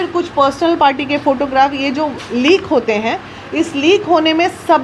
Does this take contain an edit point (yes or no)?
no